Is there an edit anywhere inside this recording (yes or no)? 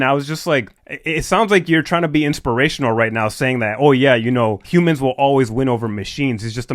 yes